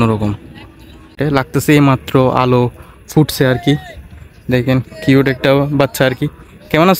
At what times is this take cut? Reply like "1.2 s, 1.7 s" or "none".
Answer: 1.2 s